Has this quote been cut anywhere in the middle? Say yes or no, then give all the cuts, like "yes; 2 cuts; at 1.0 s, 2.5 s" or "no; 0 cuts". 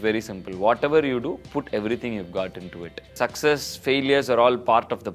yes; 1 cut; at 3.2 s